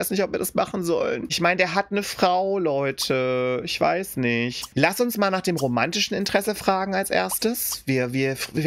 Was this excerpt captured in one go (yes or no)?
yes